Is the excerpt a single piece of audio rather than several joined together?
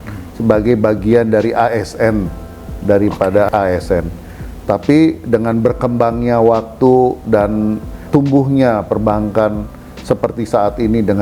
no; 1 cut; at 3.5 s

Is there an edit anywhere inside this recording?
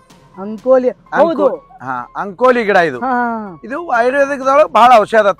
no; 0 cuts

